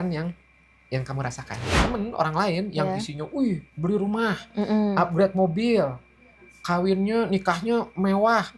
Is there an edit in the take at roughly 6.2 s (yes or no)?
no